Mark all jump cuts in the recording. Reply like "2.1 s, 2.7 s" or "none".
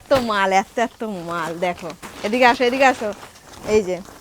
none